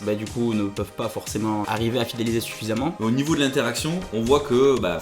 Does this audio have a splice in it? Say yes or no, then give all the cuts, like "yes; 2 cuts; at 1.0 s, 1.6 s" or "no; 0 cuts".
yes; 1 cut; at 3.0 s